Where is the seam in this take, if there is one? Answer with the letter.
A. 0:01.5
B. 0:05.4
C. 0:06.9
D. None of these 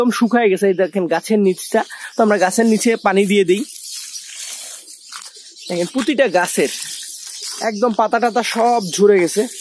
D